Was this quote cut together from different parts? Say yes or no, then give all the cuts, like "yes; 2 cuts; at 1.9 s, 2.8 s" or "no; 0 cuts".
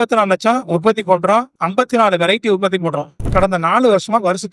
yes; 2 cuts; at 1.5 s, 3.3 s